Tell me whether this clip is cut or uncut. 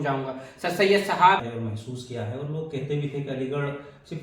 cut